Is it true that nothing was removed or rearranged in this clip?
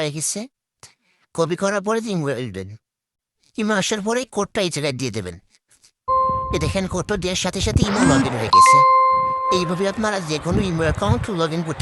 yes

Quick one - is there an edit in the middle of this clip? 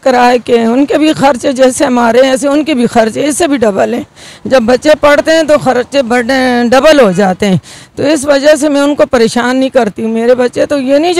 no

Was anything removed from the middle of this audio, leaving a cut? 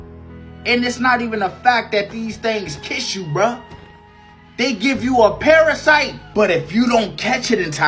yes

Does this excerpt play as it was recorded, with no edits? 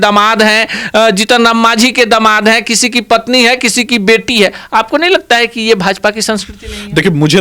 yes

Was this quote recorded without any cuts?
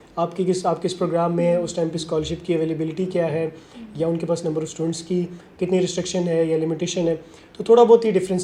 yes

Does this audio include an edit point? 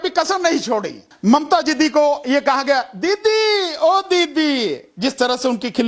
yes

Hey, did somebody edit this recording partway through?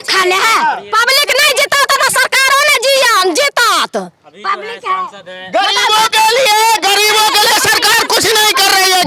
no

